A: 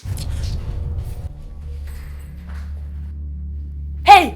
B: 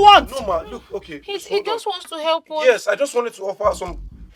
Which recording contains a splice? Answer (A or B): A